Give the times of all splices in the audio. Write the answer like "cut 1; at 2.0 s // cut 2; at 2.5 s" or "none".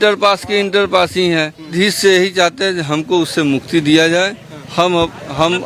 cut 1; at 1.7 s